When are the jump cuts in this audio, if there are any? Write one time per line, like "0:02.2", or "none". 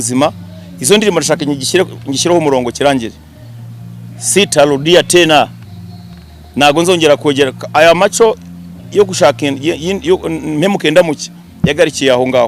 none